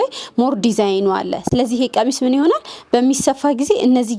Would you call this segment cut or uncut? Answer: uncut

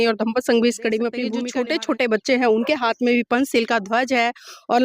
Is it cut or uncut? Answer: cut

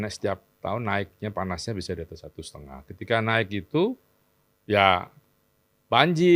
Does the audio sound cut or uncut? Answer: uncut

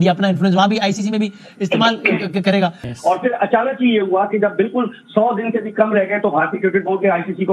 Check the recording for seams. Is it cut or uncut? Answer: cut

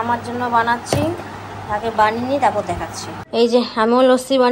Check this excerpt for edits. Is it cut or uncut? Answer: uncut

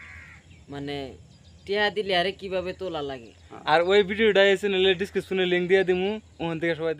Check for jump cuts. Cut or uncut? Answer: uncut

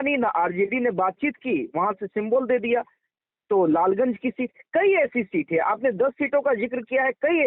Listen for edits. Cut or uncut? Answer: uncut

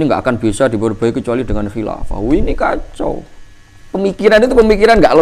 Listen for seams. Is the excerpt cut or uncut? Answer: uncut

